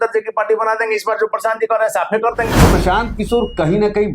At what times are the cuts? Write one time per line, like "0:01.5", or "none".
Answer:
0:02.6